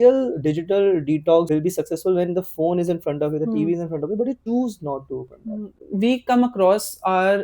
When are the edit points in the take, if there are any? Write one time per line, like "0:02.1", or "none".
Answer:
0:01.5
0:04.4
0:05.8